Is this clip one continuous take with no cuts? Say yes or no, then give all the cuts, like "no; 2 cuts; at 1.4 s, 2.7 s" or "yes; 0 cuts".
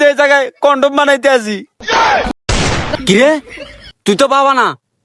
no; 1 cut; at 2.4 s